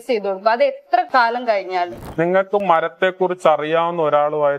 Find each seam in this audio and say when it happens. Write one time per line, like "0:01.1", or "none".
0:01.1
0:02.0